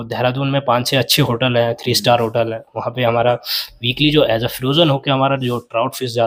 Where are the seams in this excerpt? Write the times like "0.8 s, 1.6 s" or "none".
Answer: none